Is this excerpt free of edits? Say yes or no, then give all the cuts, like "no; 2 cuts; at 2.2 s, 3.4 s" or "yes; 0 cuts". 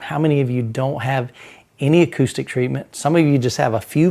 yes; 0 cuts